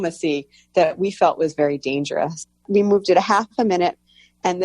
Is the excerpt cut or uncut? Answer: cut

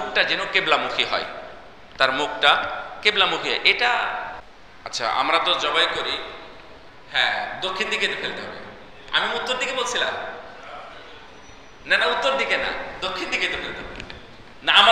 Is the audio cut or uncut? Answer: cut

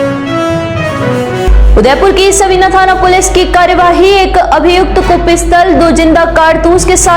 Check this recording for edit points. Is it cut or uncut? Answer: cut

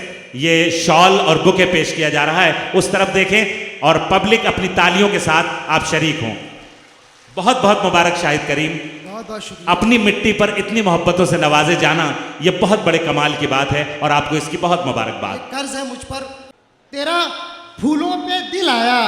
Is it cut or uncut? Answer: cut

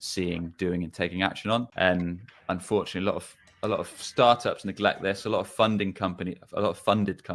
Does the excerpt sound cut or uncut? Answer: cut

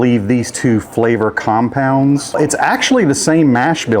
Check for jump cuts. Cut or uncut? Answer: cut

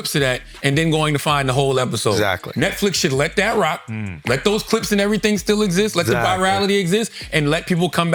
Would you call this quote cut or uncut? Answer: uncut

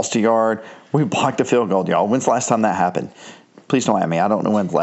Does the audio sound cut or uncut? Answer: uncut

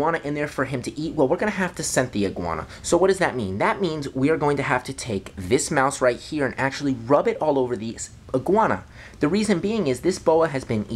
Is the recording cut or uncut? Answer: uncut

